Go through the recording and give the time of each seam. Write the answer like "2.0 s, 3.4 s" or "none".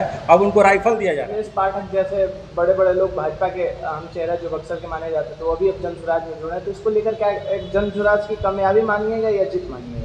1.2 s